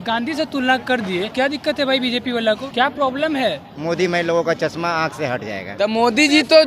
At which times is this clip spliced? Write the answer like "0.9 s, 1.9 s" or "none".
1.3 s, 2.7 s, 3.7 s, 5.6 s